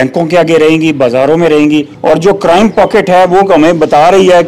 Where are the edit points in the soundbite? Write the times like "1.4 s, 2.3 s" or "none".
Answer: 1.9 s